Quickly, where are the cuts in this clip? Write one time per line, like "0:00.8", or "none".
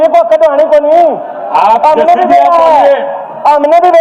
none